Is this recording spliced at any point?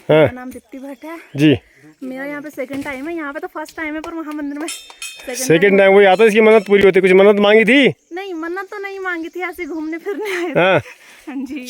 no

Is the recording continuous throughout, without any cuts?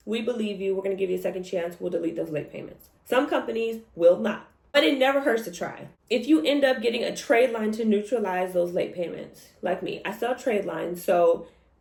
yes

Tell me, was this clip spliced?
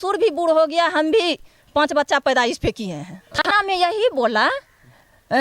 yes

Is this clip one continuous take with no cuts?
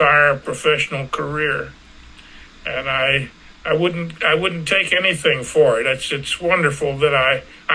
yes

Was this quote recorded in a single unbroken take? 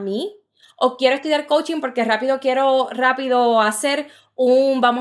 yes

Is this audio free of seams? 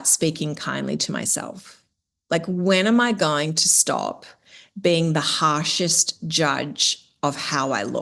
yes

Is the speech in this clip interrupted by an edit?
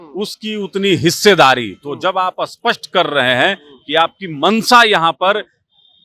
no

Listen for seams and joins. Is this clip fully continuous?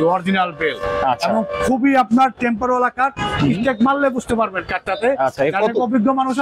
yes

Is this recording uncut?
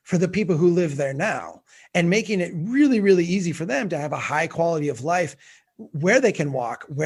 yes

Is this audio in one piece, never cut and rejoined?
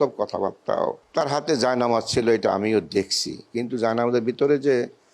no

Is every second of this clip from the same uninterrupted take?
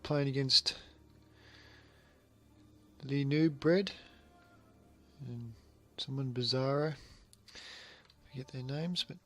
yes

